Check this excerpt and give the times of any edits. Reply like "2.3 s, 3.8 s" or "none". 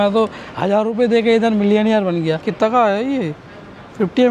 2.5 s